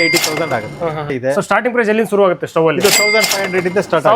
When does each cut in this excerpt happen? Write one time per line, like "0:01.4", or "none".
0:01.2